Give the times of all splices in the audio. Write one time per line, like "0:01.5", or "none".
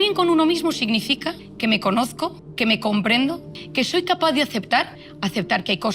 0:03.6
0:05.0